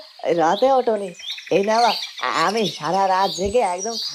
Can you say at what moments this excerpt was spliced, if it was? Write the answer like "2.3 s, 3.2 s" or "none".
none